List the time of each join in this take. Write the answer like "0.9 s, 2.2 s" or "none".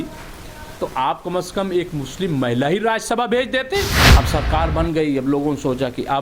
4.0 s

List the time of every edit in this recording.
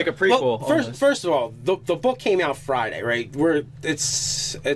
3.7 s

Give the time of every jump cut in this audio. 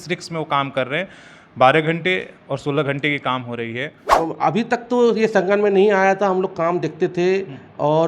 4.0 s

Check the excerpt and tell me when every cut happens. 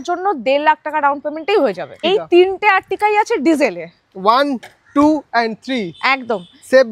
2.1 s

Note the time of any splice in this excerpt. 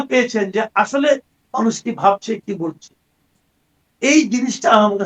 none

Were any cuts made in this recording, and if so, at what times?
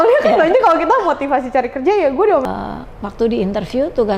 2.4 s

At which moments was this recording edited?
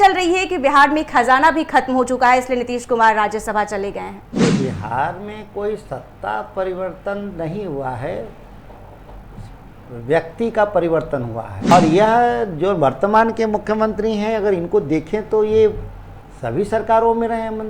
4.3 s, 11.7 s

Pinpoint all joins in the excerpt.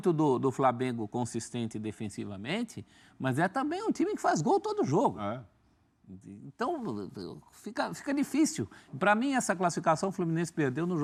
none

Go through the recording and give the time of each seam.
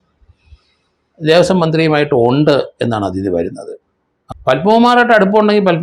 4.2 s

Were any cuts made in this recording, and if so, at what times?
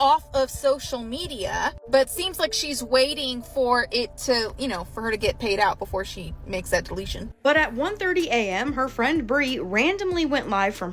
7.4 s

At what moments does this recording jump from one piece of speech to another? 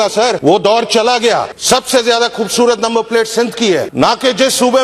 none

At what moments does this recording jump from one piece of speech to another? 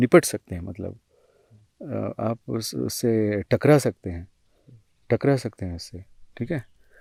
none

